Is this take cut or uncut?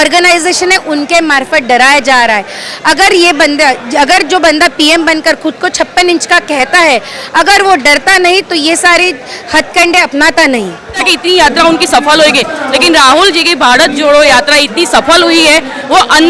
cut